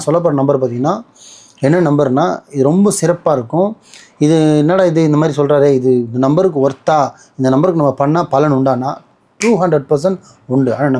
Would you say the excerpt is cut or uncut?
uncut